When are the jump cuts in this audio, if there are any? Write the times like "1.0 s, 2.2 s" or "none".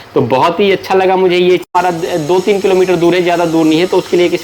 1.7 s